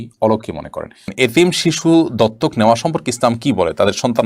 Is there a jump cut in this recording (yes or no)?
yes